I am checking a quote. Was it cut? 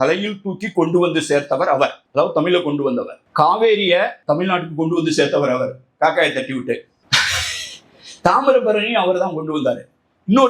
yes; 4 cuts; at 2.0 s, 3.2 s, 4.2 s, 7.0 s

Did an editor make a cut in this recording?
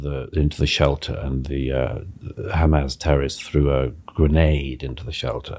no; 0 cuts

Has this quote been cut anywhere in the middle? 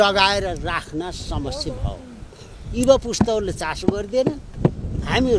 no; 0 cuts

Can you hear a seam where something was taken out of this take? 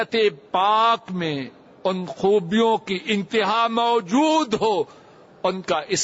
no; 0 cuts

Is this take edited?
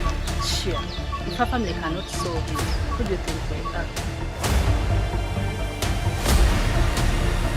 yes; 2 cuts; at 1.0 s, 2.3 s

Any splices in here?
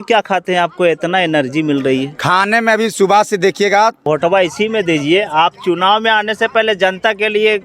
yes; 1 cut; at 4.0 s

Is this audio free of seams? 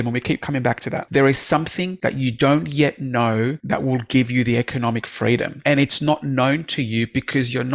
no; 4 cuts; at 1.0 s, 1.9 s, 3.6 s, 5.5 s

